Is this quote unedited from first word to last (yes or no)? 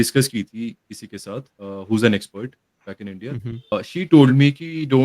no